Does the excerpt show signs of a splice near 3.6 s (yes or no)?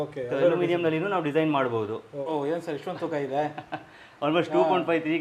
no